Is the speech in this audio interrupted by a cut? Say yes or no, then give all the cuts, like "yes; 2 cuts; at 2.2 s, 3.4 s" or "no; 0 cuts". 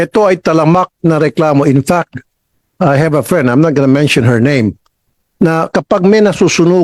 no; 0 cuts